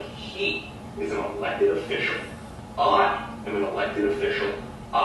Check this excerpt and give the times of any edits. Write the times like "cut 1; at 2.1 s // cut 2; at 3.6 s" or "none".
none